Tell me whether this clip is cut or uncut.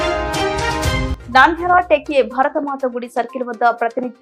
uncut